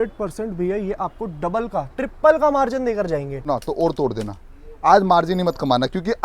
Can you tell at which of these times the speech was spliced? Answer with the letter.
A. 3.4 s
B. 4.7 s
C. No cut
A